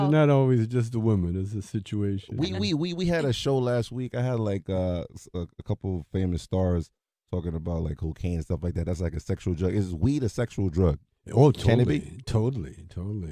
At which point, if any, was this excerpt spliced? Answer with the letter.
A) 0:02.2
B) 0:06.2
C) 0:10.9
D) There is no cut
B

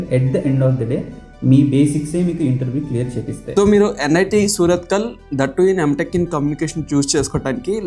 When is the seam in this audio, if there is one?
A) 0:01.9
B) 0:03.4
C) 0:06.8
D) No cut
B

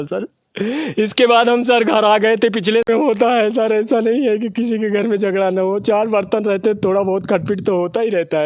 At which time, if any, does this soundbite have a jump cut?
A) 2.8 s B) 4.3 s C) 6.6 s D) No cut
A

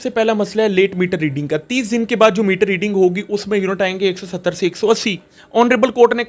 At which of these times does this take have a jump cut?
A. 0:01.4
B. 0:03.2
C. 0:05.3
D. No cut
C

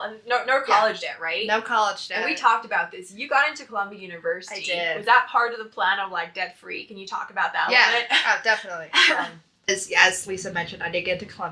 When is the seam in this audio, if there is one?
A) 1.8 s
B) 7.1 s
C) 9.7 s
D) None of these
C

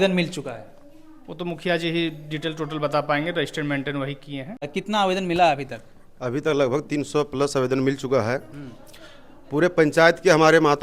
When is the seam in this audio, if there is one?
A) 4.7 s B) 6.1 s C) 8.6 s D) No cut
A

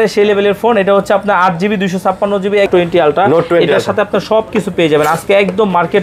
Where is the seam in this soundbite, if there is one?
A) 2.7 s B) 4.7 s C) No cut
A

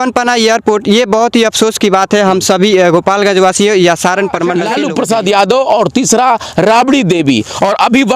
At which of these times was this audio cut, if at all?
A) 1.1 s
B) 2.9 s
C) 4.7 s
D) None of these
C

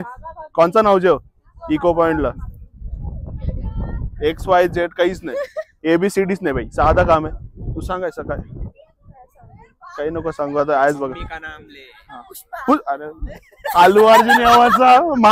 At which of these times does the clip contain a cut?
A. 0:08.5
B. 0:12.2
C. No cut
C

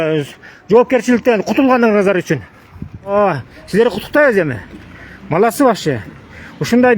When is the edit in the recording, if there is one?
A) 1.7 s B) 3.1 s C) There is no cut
B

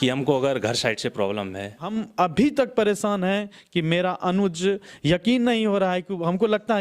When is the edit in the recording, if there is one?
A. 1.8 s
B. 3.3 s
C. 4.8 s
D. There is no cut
A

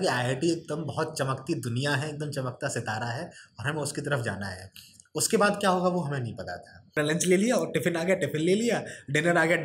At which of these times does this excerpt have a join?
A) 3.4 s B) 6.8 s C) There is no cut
B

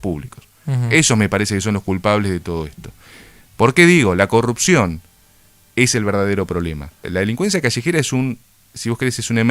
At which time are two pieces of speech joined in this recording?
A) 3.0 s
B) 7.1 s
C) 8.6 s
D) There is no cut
B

